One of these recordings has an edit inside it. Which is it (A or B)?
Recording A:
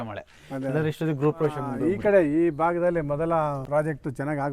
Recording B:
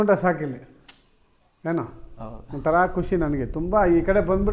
A